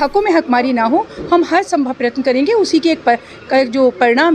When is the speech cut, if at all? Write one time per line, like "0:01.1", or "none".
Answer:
none